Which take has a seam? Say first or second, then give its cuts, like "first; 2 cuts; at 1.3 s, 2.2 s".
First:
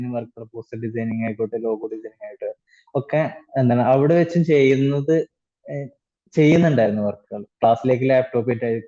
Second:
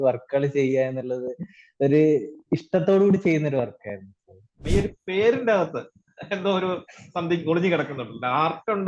second; 1 cut; at 4.6 s